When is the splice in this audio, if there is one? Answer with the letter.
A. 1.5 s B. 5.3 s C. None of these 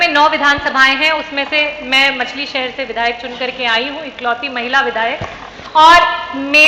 C